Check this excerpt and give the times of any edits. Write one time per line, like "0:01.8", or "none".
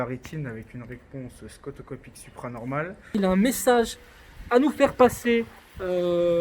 0:03.1